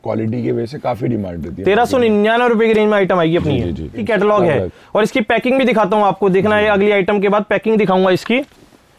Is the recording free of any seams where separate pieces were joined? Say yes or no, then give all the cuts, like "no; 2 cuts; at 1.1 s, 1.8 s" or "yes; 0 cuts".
yes; 0 cuts